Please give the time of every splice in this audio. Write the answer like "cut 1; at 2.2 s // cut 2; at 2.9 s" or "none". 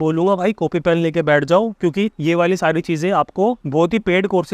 cut 1; at 2.2 s // cut 2; at 3.6 s